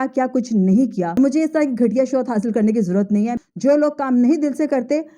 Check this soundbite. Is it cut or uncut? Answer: cut